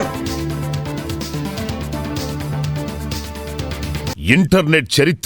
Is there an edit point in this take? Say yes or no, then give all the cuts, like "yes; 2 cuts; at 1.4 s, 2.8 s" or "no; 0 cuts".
yes; 1 cut; at 4.2 s